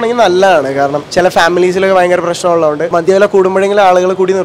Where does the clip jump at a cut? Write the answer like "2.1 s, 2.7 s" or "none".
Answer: 1.0 s, 2.9 s

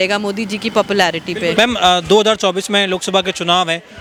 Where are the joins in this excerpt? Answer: none

